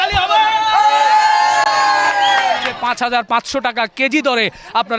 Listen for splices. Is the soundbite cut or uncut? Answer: cut